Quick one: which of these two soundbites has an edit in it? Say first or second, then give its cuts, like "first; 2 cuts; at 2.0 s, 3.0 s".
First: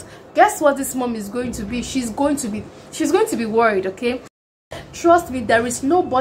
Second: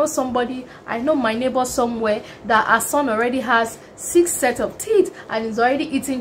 first; 1 cut; at 4.6 s